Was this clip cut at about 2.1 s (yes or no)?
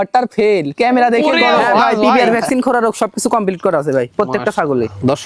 yes